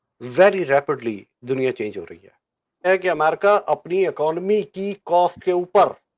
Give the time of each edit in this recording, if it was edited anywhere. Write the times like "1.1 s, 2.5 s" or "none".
2.9 s

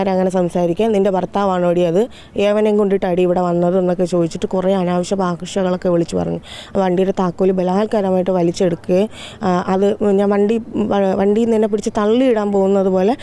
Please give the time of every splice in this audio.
6.6 s

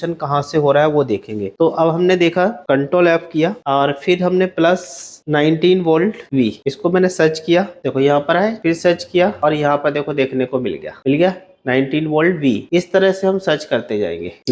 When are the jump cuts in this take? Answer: none

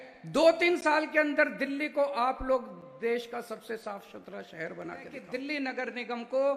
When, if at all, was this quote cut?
5.2 s

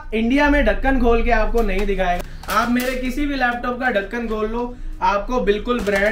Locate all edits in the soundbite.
2.2 s

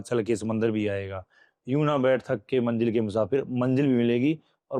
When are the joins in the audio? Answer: none

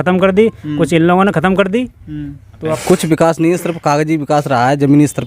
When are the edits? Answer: 2.7 s

